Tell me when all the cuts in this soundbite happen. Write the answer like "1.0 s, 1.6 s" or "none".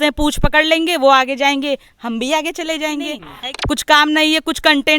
3.3 s